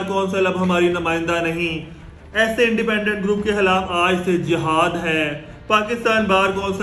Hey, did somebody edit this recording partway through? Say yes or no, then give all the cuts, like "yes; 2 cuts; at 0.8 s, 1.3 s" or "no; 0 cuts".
no; 0 cuts